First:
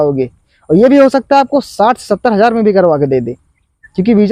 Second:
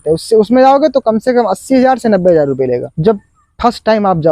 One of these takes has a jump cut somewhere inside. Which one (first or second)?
second